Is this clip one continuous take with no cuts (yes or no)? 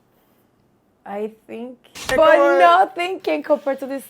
no